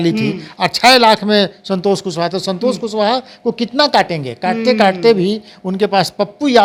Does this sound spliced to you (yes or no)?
no